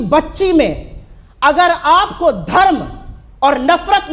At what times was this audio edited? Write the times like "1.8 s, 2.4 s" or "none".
none